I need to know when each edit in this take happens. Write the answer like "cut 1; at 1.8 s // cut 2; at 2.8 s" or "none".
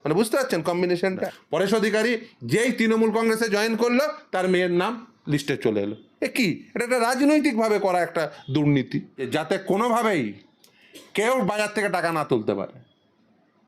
cut 1; at 1.2 s // cut 2; at 9.3 s